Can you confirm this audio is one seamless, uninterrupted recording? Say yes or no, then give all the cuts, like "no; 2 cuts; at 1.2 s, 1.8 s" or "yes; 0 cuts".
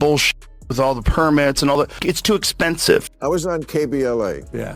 no; 1 cut; at 2.8 s